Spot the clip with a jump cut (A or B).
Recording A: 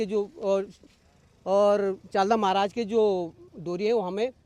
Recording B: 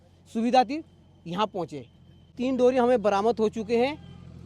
B